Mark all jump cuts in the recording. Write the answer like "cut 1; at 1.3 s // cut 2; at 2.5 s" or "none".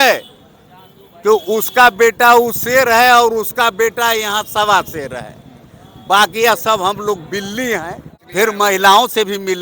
cut 1; at 8.1 s

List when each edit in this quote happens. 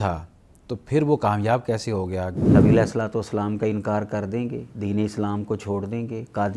cut 1; at 2.5 s // cut 2; at 4.7 s

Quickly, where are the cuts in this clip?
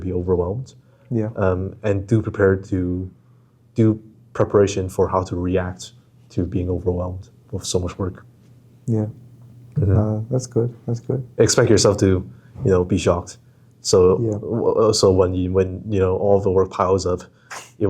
none

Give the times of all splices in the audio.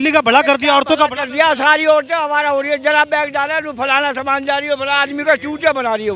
none

